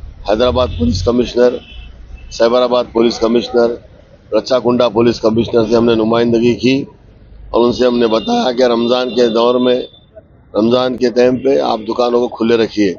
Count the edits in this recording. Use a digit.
0